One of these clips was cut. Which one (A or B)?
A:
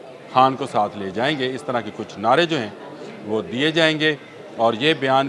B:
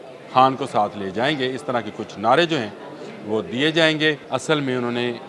B